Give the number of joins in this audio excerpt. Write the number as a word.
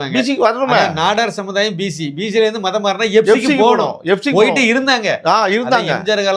zero